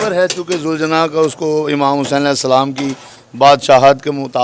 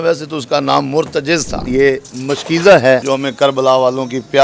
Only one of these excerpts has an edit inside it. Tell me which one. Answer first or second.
second